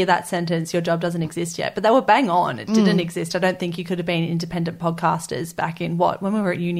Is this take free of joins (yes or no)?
yes